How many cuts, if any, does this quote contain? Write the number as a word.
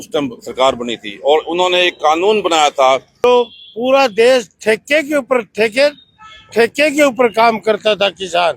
one